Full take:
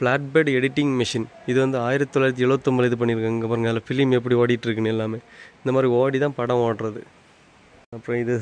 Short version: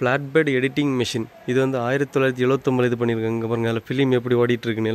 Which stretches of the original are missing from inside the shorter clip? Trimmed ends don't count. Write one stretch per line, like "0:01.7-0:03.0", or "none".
none